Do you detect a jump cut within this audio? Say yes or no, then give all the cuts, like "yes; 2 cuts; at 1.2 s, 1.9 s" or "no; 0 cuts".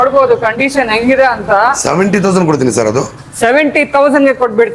no; 0 cuts